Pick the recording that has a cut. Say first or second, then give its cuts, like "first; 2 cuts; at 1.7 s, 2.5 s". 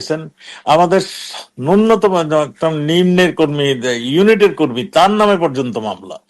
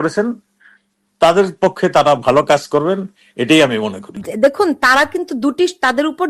second; 1 cut; at 4.2 s